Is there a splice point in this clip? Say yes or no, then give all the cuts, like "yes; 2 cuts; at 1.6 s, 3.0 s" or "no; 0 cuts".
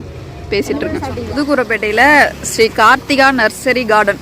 yes; 1 cut; at 1.3 s